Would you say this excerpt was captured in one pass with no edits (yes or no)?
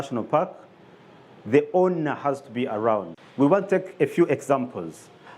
no